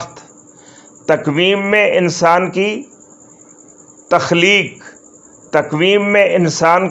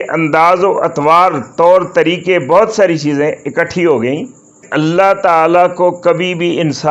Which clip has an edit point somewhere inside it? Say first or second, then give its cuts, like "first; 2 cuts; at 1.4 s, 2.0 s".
second; 1 cut; at 4.6 s